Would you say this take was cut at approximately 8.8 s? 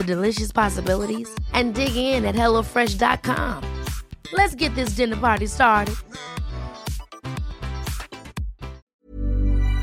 yes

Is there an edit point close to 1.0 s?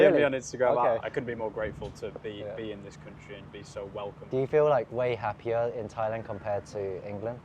yes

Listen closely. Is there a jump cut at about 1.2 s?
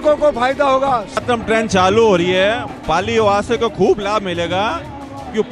yes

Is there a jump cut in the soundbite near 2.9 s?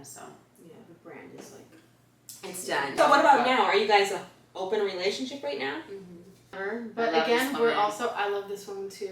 yes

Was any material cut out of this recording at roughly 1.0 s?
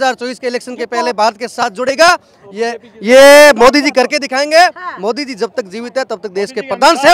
no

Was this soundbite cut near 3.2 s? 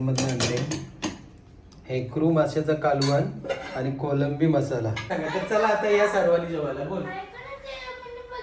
no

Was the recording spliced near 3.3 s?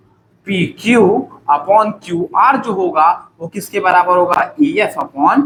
no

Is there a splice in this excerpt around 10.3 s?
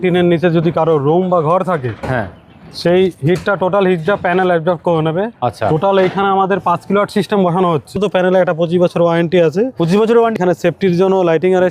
yes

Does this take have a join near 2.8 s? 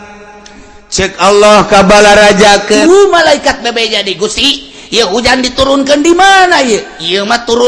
yes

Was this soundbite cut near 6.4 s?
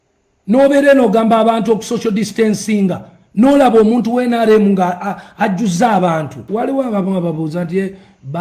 yes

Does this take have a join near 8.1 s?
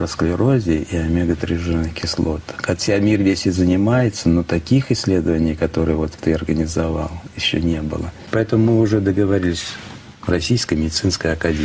yes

